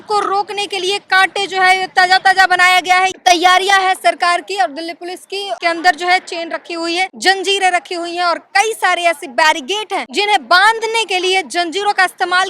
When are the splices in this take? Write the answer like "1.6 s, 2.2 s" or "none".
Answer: 3.1 s, 5.5 s, 7.1 s, 10.1 s